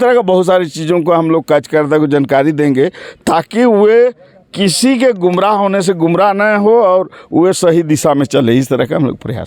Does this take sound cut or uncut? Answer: uncut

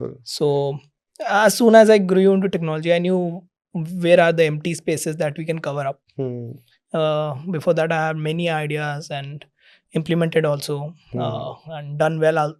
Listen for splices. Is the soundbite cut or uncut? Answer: uncut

